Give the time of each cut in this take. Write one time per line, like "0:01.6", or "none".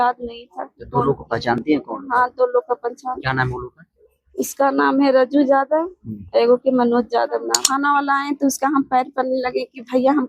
0:07.6